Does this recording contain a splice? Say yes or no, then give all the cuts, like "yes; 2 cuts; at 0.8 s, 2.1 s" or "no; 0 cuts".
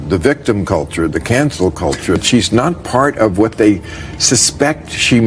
yes; 1 cut; at 2.2 s